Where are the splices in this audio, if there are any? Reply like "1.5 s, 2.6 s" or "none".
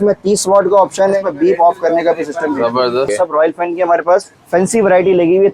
1.2 s, 3.1 s, 4.4 s